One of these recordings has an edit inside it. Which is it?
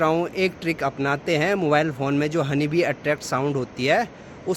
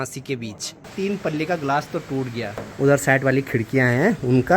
second; 2 cuts; at 0.9 s, 2.6 s

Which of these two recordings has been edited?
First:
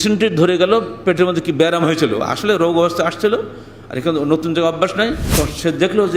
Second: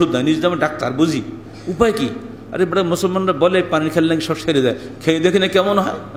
first; 1 cut; at 5.2 s

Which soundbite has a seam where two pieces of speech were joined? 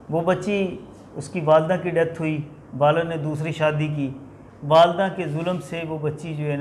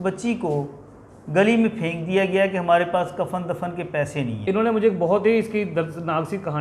second; 1 cut; at 4.4 s

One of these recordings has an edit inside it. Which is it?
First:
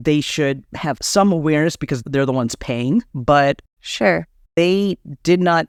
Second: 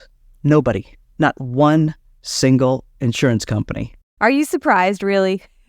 second; 1 cut; at 4.1 s

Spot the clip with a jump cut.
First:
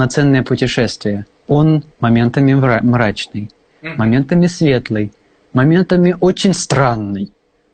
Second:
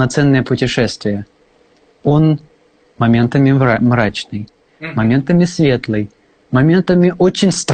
first; 2 cuts; at 1.3 s, 1.9 s

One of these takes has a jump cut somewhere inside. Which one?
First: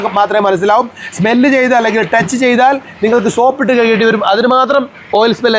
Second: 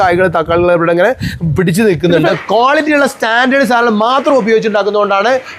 second; 1 cut; at 2.3 s

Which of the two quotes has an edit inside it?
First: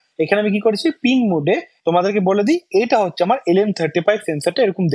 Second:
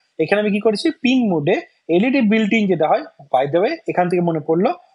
first; 1 cut; at 1.7 s

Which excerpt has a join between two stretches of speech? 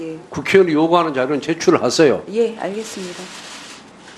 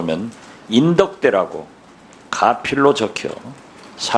first; 1 cut; at 1.4 s

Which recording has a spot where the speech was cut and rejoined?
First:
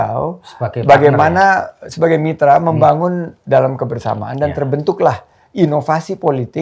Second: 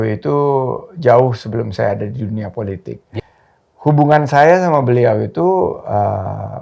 second; 1 cut; at 3.2 s

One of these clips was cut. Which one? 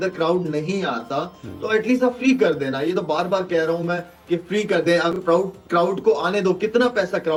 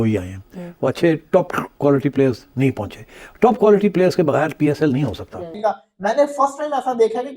second; 1 cut; at 5.5 s

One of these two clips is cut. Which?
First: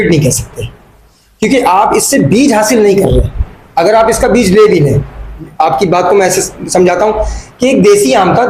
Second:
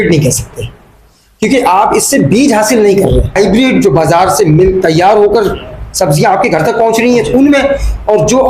second; 1 cut; at 3.3 s

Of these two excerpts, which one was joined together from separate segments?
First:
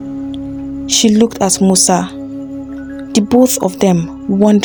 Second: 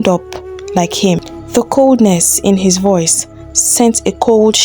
second; 1 cut; at 1.3 s

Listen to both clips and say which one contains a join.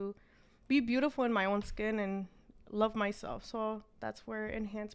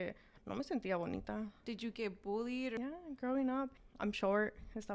second; 3 cuts; at 1.6 s, 2.8 s, 3.8 s

